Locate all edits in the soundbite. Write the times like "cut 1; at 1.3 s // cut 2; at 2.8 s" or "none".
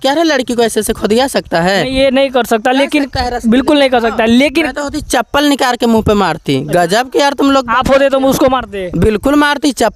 none